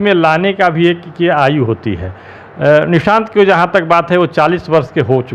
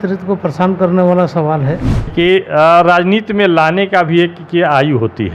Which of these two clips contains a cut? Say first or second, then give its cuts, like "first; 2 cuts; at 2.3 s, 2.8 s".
second; 1 cut; at 2.1 s